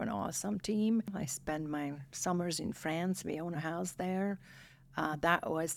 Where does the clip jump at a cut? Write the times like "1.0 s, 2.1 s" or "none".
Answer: 1.1 s

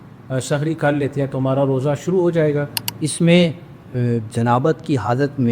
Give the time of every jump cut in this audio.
2.8 s

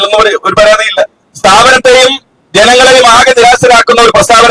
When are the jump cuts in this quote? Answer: 1.2 s

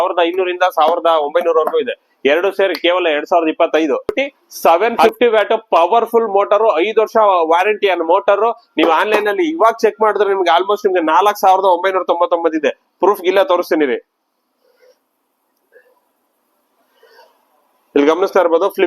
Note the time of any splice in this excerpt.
4.1 s

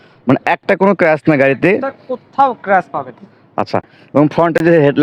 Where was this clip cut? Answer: none

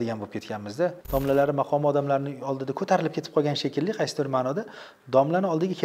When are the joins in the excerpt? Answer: 1.0 s

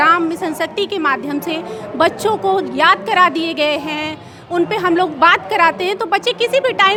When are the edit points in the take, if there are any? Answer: none

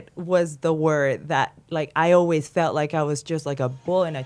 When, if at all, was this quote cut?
none

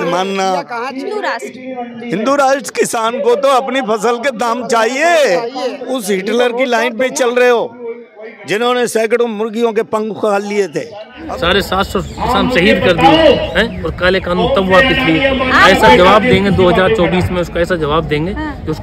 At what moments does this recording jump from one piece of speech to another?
1.2 s, 5.8 s, 11.3 s

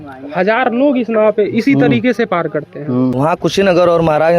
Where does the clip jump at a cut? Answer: 3.1 s

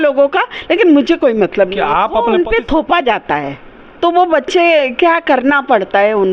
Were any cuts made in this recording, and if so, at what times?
2.4 s

